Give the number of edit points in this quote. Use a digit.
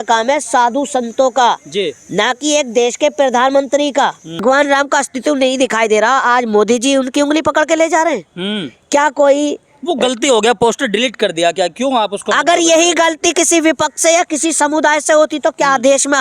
1